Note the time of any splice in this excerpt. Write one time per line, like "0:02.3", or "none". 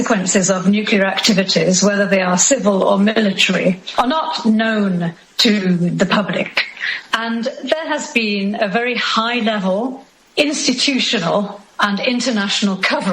0:06.9